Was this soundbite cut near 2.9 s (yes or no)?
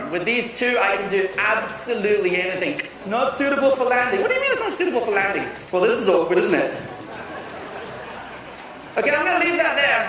yes